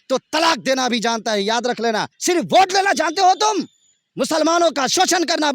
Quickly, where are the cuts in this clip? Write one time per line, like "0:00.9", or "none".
0:02.1